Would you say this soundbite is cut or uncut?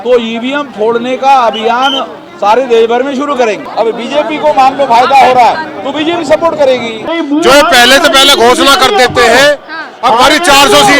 cut